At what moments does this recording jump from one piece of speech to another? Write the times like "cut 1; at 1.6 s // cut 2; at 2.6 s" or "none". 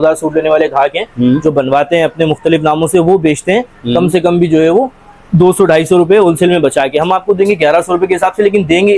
none